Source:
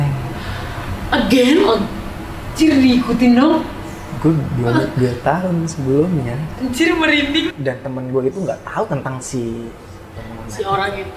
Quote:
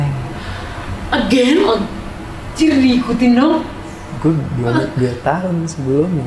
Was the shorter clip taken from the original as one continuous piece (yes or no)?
yes